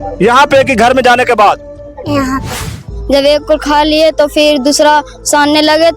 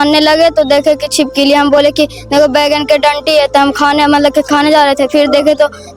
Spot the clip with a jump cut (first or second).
first